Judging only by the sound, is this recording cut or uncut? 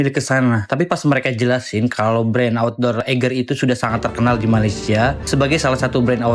uncut